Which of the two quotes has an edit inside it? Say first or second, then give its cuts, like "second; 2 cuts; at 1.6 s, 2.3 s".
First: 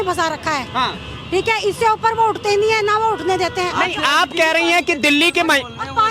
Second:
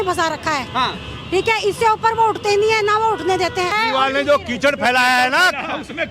second; 1 cut; at 3.7 s